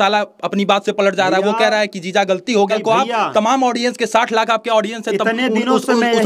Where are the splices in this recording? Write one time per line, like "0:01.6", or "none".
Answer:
0:02.7